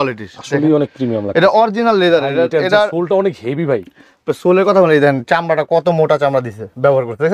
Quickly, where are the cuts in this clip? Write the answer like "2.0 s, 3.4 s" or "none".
none